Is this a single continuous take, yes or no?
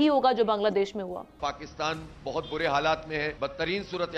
no